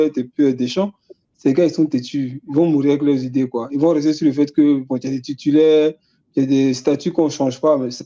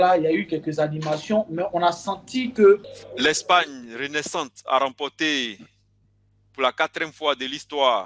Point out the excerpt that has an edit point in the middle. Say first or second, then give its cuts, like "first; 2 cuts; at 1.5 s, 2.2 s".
second; 1 cut; at 2.9 s